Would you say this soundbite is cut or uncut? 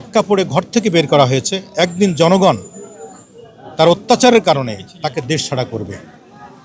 uncut